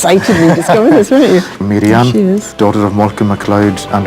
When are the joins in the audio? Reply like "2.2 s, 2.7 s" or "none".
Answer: 1.5 s, 2.5 s